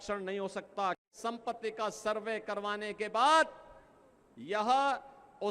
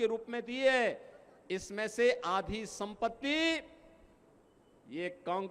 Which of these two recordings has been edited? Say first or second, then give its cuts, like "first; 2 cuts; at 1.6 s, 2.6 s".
first; 1 cut; at 1.1 s